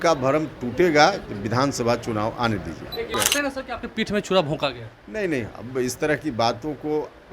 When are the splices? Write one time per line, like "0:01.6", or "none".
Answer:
0:03.1